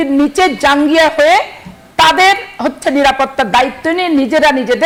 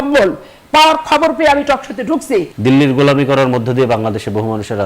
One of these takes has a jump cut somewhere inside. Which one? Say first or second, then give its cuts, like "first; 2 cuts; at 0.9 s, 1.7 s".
second; 1 cut; at 2.5 s